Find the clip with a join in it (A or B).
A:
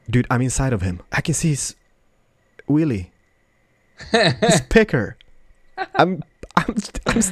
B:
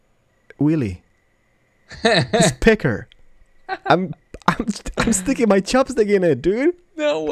A